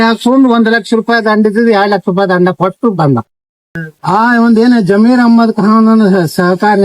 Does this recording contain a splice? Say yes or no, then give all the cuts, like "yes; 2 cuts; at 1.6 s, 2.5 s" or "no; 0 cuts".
yes; 1 cut; at 3.9 s